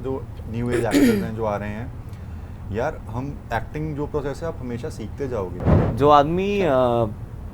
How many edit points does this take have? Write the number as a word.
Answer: one